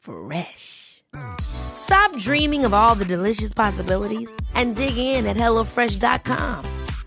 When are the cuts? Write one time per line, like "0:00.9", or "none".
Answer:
none